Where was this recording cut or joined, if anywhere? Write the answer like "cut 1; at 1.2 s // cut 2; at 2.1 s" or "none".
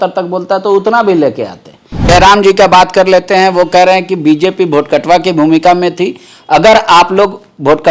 cut 1; at 2.0 s